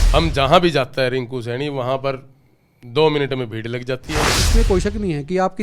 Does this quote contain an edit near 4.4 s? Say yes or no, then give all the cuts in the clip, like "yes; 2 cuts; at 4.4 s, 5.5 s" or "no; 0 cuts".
yes; 1 cut; at 4.4 s